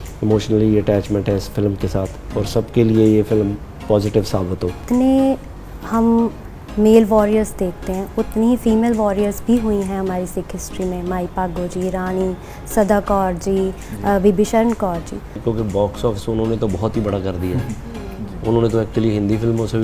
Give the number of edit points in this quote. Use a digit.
2